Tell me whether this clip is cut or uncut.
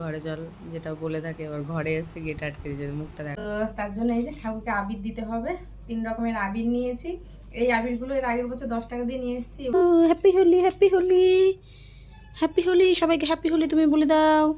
cut